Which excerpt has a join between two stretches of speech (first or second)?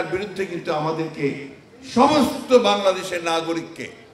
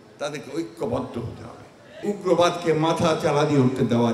second